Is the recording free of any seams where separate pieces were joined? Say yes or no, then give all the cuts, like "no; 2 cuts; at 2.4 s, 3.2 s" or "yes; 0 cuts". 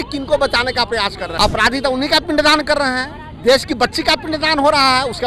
no; 1 cut; at 1.2 s